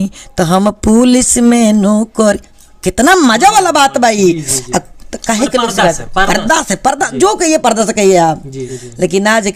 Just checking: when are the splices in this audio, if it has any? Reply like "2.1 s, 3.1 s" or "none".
none